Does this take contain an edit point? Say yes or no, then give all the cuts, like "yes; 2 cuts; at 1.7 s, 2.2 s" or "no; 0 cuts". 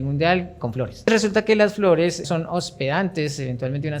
yes; 2 cuts; at 1.1 s, 2.2 s